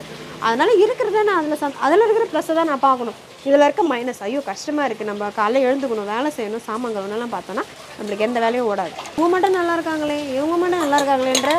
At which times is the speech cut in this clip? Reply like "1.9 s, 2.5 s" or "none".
9.0 s